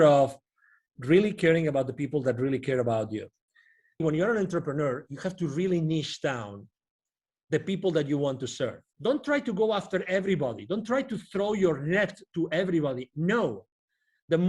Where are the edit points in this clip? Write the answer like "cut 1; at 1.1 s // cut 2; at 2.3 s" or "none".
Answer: cut 1; at 4.0 s // cut 2; at 8.9 s